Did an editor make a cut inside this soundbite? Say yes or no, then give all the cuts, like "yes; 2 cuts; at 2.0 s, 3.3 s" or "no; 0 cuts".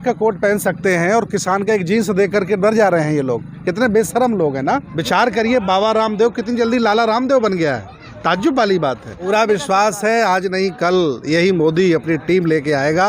yes; 2 cuts; at 4.9 s, 9.3 s